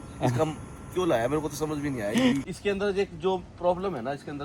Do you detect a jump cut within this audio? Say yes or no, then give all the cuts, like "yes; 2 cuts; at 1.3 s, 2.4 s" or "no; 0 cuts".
yes; 1 cut; at 2.5 s